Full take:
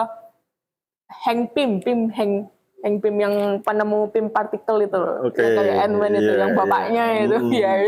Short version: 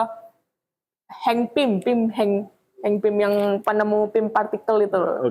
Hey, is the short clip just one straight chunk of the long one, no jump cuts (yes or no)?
yes